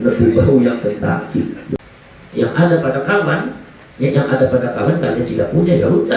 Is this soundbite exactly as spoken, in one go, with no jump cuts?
no; 1 cut; at 1.7 s

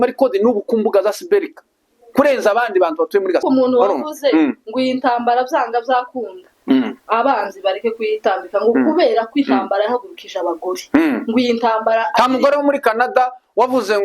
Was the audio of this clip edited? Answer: yes; 1 cut; at 3.4 s

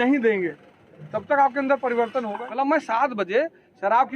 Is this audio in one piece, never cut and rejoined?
no; 1 cut; at 2.4 s

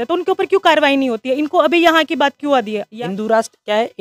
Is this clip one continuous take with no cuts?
no; 1 cut; at 2.9 s

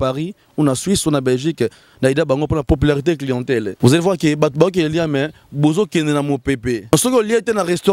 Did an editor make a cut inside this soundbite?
yes; 3 cuts; at 2.6 s, 3.7 s, 6.9 s

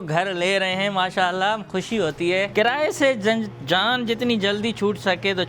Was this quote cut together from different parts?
yes; 1 cut; at 2.5 s

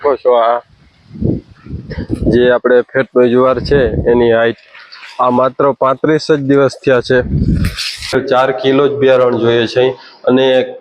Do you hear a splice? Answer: yes; 1 cut; at 8.2 s

